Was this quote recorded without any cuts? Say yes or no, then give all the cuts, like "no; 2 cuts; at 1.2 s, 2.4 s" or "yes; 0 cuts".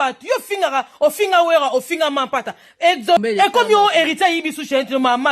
no; 1 cut; at 3.2 s